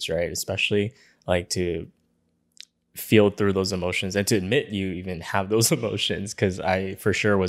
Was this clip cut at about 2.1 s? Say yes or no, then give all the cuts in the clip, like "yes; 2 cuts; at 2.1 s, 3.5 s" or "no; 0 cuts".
no; 0 cuts